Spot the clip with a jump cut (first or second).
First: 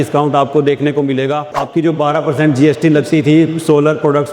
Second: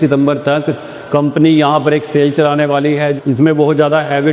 first